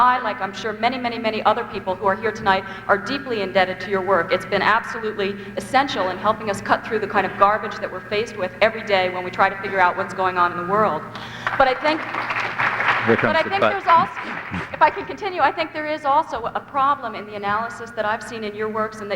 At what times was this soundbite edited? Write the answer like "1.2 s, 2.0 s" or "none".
10.5 s